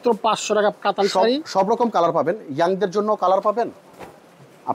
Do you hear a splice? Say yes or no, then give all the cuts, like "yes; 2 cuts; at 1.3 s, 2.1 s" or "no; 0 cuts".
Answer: no; 0 cuts